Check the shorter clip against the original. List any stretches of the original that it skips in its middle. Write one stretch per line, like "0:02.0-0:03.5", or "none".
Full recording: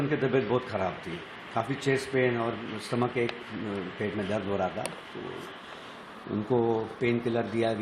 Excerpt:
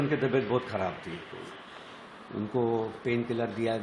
0:01.3-0:05.3

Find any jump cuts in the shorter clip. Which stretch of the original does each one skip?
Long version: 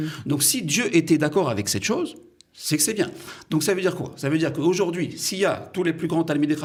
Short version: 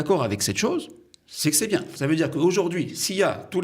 0:03.2-0:04.1

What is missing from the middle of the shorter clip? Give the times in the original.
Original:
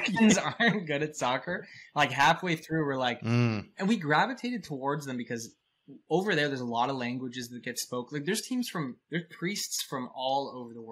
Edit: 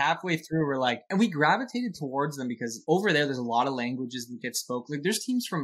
0:03.2-0:03.7
0:05.4-0:05.9

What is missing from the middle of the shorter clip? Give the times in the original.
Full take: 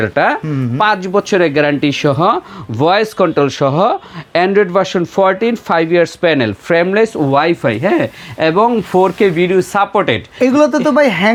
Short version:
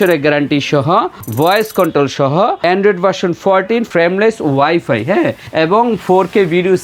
0:02.5-0:02.6
0:04.0-0:04.3
0:05.6-0:06.6
0:08.2-0:08.3

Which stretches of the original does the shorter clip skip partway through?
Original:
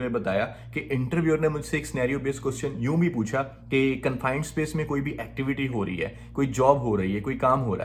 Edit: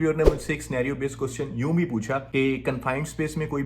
0:03.5-0:03.6

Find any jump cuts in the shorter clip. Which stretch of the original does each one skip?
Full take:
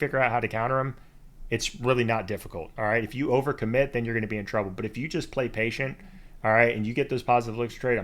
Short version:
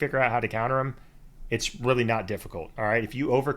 none

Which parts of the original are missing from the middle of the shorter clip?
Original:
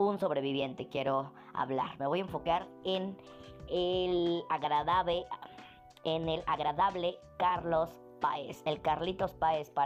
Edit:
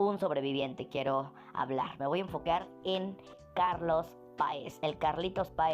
0:03.4-0:07.2

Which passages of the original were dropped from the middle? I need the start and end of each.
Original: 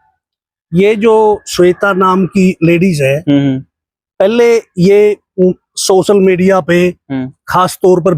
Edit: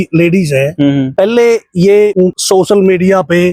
0:03.6-0:04.1
0:05.3-0:05.6

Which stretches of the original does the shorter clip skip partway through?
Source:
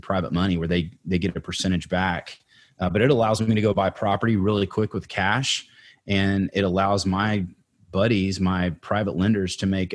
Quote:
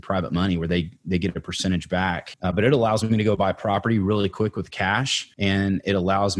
0:02.3-0:02.7
0:05.6-0:05.9

